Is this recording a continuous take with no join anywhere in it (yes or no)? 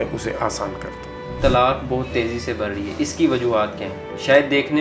no